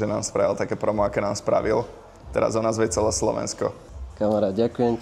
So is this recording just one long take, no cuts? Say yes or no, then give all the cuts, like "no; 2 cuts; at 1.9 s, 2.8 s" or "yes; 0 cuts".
yes; 0 cuts